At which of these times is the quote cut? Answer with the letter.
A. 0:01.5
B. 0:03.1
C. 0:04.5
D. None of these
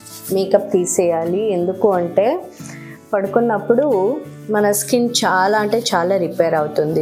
D